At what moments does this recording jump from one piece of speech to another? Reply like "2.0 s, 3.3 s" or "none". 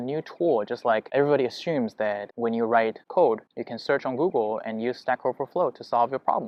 none